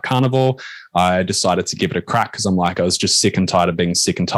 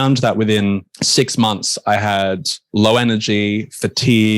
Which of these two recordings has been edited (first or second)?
second